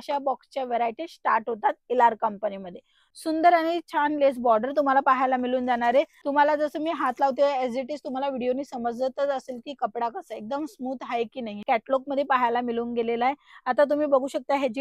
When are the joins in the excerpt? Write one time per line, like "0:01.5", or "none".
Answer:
0:03.1
0:06.2
0:11.5